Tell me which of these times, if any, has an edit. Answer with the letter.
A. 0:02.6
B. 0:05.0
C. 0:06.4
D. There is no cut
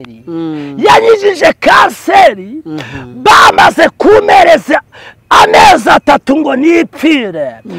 D